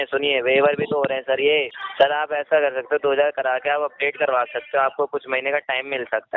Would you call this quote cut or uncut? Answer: cut